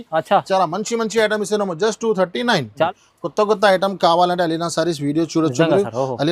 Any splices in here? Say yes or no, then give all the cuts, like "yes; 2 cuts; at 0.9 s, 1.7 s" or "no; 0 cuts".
yes; 1 cut; at 2.8 s